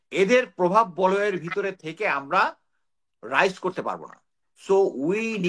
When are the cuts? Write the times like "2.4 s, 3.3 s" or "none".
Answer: none

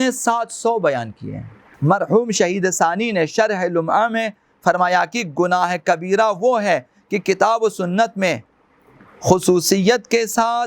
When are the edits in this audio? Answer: 1.7 s

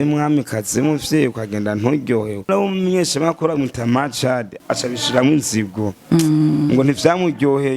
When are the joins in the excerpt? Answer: 2.5 s, 4.5 s

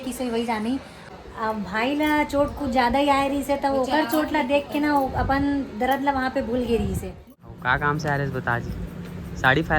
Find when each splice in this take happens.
0.9 s, 7.1 s

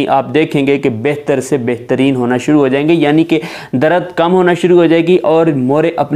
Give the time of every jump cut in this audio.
none

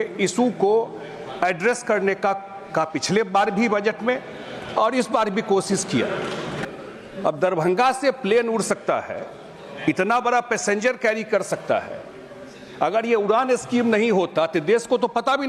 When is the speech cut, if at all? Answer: 6.6 s

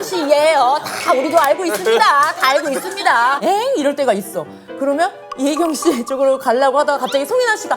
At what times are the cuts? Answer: 3.4 s

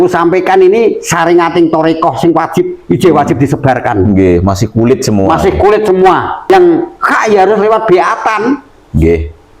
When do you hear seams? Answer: 6.5 s

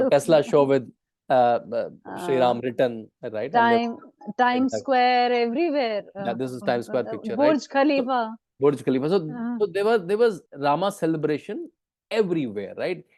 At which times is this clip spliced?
10.5 s

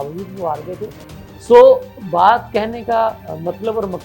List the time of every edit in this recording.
none

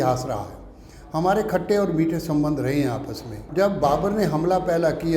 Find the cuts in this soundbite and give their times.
3.4 s

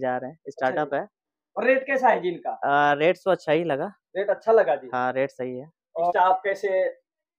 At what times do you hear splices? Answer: 6.1 s

